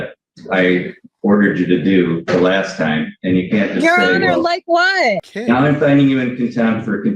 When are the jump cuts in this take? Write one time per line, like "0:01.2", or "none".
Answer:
0:05.3